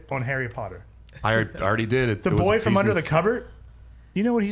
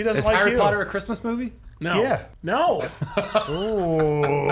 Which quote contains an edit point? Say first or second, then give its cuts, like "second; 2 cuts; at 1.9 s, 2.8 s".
second; 1 cut; at 2.3 s